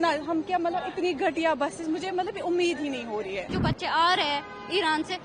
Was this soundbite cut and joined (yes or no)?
yes